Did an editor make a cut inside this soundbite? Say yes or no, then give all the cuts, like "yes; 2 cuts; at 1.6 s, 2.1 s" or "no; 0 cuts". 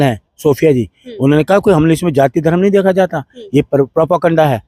no; 0 cuts